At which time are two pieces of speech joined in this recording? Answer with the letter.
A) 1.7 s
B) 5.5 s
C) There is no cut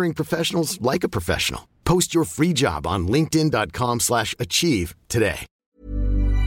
B